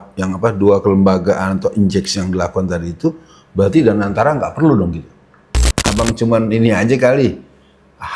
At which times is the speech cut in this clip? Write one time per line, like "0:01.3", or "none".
0:05.7